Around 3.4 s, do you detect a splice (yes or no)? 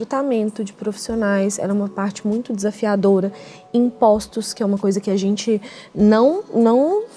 no